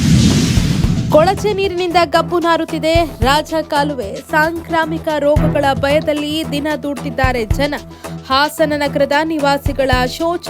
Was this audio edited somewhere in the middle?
yes; 1 cut; at 1.0 s

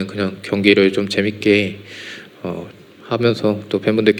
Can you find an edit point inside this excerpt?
no; 0 cuts

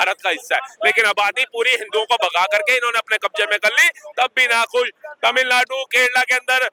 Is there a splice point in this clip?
no; 0 cuts

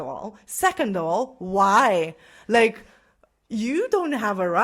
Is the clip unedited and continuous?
yes; 0 cuts

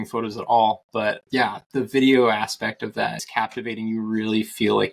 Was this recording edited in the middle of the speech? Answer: yes; 1 cut; at 3.2 s

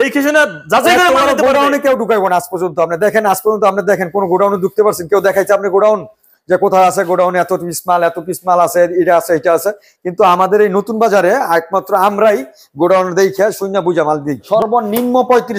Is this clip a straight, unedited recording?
no; 1 cut; at 14.5 s

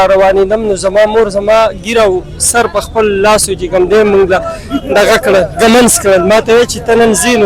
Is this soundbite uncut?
yes; 0 cuts

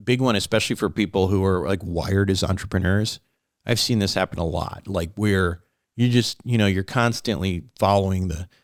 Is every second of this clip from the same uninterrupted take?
yes; 0 cuts

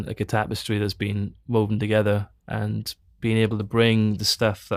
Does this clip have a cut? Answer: no; 0 cuts

